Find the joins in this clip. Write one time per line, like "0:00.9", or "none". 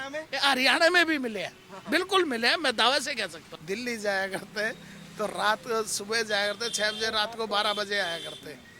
0:03.5